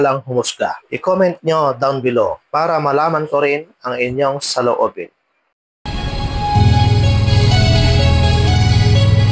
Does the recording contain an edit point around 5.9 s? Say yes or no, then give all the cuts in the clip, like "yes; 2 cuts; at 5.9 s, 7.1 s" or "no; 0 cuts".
yes; 1 cut; at 5.9 s